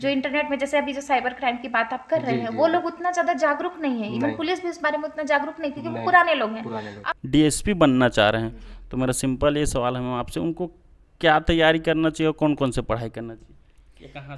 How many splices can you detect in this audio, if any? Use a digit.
1